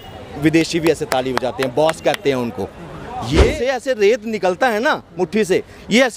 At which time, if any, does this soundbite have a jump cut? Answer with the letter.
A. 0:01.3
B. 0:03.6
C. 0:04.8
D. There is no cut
B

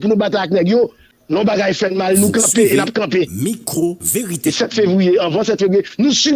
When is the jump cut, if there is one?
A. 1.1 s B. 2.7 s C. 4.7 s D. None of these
A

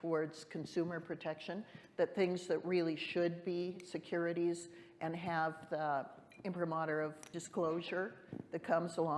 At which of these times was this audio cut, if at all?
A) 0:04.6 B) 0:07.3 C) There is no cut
B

